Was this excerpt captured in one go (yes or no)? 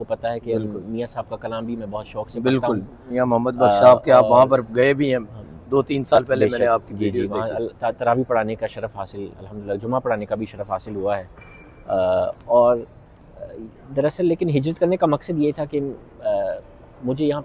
yes